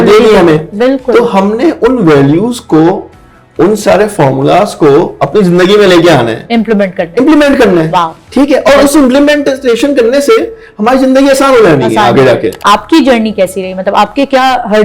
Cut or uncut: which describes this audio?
cut